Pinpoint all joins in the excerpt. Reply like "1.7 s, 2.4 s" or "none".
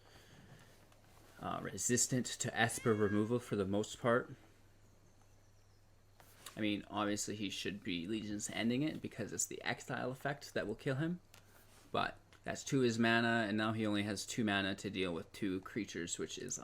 12.2 s